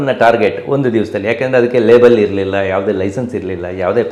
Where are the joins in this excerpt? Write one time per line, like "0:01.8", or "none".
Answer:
none